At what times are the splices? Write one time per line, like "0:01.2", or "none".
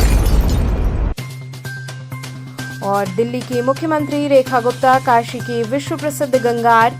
0:02.2